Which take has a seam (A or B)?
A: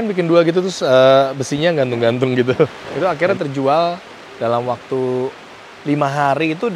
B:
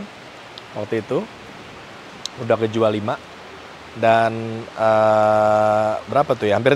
A